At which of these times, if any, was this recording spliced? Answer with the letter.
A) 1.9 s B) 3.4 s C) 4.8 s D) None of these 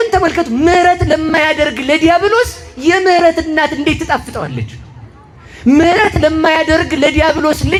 D